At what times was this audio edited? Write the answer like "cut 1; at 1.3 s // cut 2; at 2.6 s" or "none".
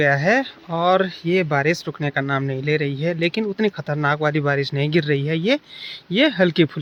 none